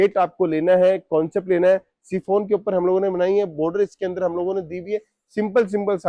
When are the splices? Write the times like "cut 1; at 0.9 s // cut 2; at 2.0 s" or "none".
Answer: none